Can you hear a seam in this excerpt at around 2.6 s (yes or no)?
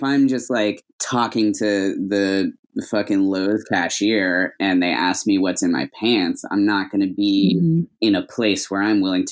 no